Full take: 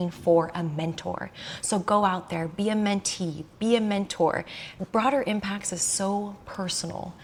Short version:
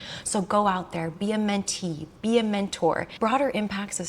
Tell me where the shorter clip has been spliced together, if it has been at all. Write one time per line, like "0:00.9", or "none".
0:03.1